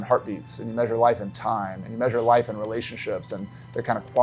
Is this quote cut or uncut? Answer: uncut